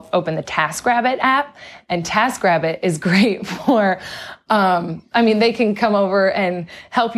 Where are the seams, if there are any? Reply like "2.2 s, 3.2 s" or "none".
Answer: none